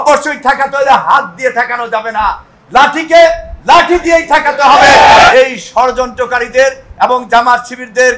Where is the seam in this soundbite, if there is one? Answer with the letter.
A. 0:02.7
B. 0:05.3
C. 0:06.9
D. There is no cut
B